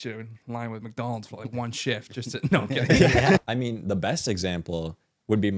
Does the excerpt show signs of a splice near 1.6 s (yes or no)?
no